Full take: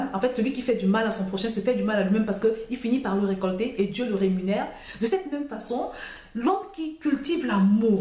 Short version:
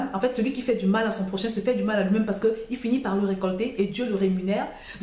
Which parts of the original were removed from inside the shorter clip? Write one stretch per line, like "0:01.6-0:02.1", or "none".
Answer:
none

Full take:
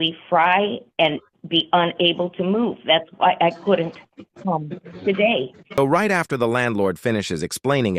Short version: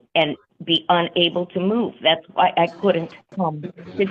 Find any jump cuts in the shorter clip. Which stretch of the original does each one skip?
0:04.0-0:04.3

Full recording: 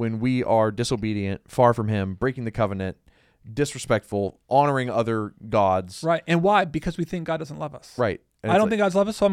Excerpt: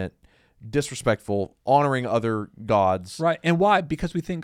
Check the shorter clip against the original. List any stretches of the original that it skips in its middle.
none

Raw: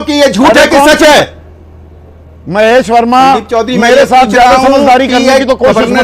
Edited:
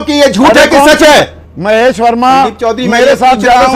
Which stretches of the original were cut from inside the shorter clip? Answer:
0:01.5-0:02.4

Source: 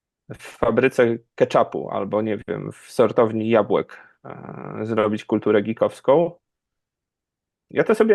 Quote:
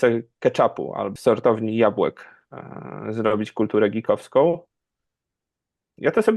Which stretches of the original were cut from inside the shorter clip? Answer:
0:02.0-0:02.8

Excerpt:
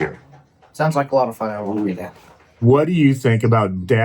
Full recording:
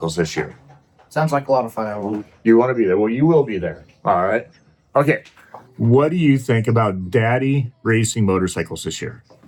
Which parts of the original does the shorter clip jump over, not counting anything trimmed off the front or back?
0:02.4-0:05.2

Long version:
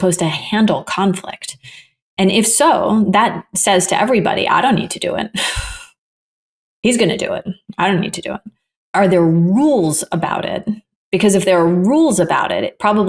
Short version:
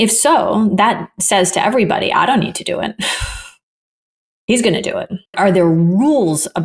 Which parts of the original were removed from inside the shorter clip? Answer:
0:07.6-0:08.8

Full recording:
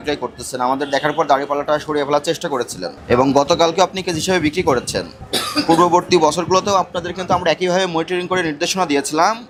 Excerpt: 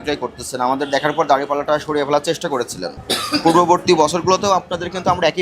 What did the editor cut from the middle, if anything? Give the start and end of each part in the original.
0:02.9-0:05.2

